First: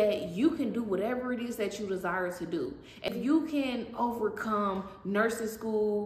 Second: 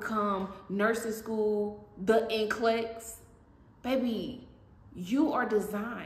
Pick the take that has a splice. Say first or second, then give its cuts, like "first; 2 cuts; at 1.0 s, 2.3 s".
first; 1 cut; at 3.1 s